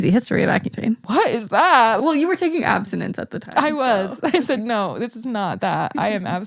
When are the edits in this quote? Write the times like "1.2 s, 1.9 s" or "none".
1.0 s, 2.0 s